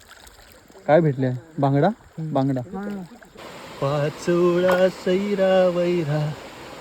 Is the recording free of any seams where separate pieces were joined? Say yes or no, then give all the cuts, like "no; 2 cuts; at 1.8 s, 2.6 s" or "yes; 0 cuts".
no; 1 cut; at 3.2 s